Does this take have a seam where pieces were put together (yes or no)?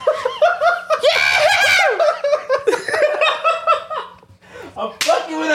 no